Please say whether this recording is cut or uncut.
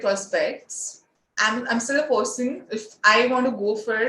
cut